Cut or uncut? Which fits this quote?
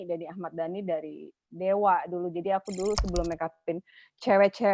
uncut